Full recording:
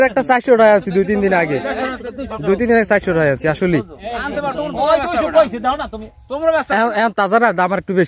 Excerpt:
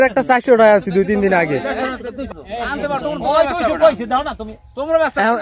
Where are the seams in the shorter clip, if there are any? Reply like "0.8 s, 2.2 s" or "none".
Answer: 2.4 s